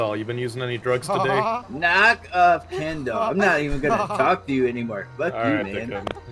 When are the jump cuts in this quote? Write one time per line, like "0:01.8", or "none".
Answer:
none